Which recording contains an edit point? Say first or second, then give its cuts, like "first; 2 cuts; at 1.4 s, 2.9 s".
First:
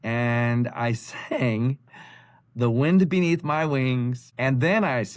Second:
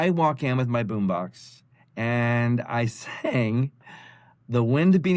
first; 1 cut; at 4.2 s